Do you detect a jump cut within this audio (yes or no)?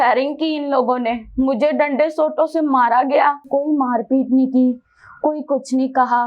yes